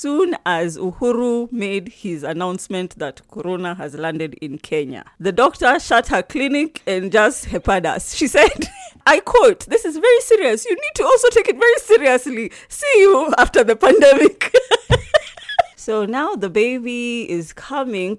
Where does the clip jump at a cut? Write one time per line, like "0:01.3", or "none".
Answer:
0:15.7